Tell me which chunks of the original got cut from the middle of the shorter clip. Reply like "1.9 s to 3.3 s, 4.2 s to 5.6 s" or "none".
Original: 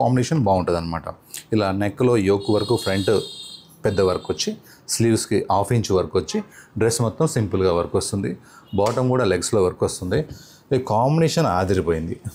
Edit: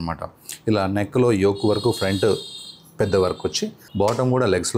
4.6 s to 8.5 s